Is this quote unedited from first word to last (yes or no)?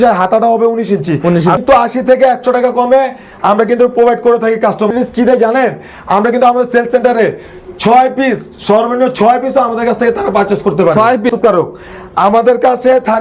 no